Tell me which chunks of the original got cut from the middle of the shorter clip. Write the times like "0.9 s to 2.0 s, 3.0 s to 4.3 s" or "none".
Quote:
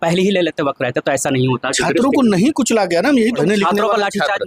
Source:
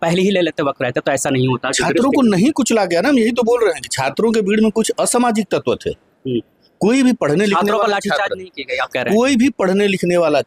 3.4 s to 7.3 s